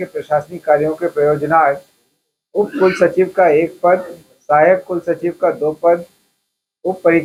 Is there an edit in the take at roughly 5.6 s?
no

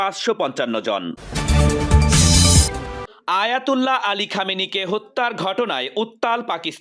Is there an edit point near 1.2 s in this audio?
yes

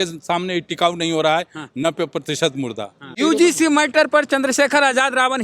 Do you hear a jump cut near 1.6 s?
no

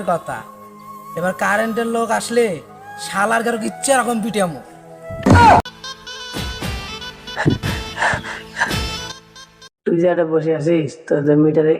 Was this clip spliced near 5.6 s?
yes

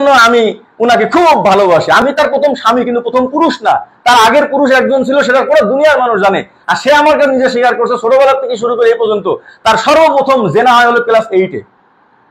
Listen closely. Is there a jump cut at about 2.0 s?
yes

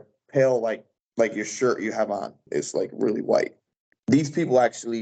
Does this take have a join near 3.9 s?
yes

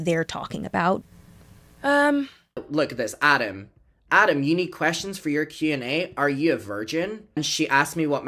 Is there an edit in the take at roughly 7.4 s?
yes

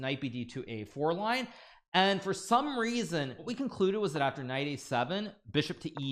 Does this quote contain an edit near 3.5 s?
yes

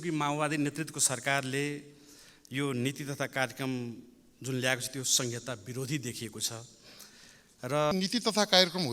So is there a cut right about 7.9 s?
yes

